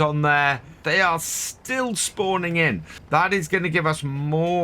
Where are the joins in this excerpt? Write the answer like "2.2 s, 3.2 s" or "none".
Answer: 0.8 s, 2.9 s